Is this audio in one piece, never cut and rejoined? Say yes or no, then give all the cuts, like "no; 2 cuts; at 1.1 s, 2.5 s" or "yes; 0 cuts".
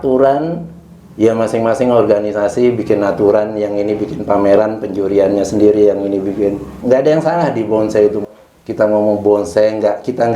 no; 2 cuts; at 6.7 s, 8.2 s